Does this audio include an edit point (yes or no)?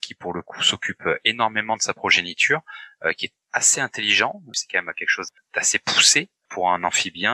no